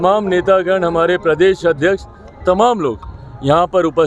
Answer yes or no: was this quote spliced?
no